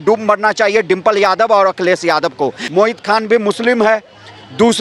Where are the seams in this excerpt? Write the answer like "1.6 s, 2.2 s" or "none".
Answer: 2.6 s